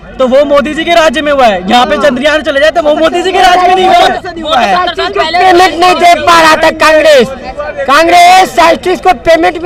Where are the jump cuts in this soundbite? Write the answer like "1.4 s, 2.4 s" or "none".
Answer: none